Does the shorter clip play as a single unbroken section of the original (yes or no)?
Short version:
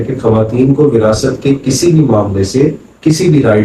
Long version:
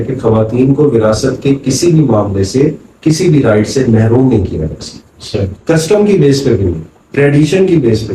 yes